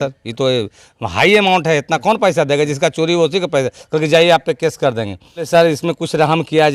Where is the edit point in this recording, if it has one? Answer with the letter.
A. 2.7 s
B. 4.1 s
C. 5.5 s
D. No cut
C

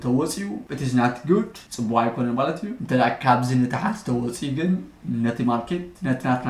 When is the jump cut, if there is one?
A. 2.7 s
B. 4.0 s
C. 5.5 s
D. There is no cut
A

